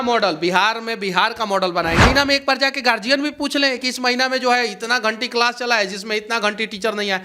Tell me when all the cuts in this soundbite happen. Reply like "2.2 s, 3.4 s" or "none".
2.0 s

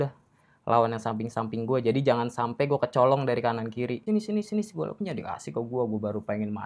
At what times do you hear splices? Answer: 4.0 s

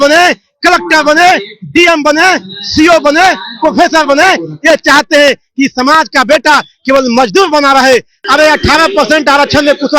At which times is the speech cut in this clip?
8.1 s

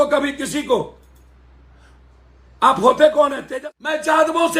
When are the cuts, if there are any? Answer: 3.4 s

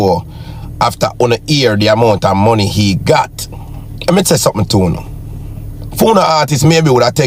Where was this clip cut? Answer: none

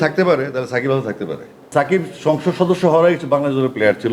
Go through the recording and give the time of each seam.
1.7 s

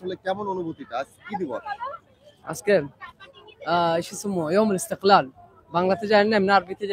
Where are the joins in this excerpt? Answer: none

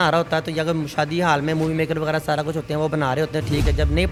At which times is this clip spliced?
none

